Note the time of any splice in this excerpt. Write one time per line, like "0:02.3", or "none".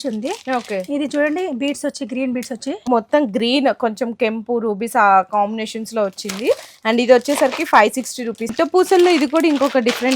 0:02.8
0:08.5